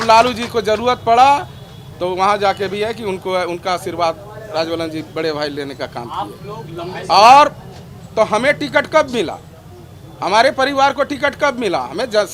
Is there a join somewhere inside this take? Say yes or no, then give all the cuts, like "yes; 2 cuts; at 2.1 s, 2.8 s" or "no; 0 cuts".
no; 0 cuts